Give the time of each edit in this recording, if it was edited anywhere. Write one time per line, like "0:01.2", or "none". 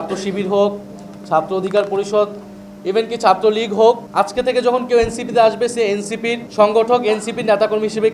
0:04.1
0:06.4

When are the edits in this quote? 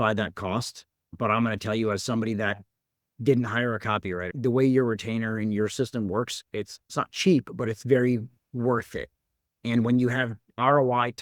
0:04.2

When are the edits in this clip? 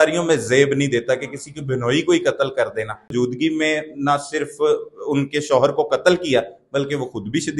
0:03.1

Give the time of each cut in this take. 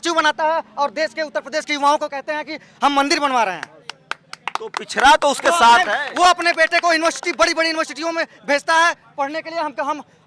none

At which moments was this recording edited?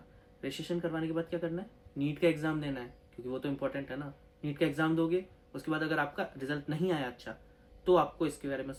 none

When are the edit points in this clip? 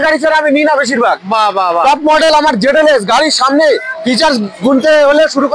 none

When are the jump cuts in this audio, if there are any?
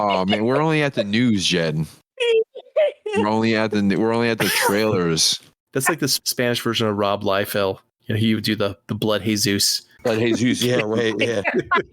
0:05.9
0:09.8

